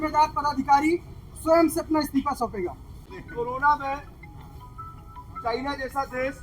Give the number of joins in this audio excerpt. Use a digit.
1